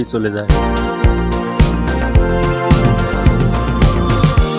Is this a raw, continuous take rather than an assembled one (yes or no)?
yes